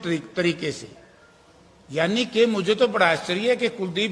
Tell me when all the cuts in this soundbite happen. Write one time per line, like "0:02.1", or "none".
none